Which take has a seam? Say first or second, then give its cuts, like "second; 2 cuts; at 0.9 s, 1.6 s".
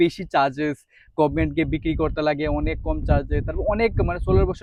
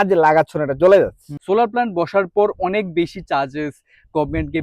second; 1 cut; at 1.3 s